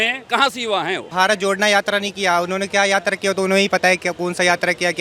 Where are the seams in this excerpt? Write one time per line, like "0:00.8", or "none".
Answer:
0:01.1